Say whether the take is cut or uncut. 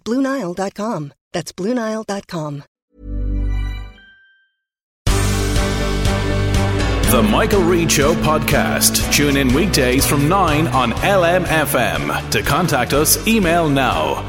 cut